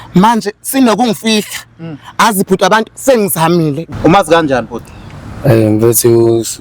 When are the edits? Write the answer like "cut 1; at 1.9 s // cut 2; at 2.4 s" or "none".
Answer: cut 1; at 3.8 s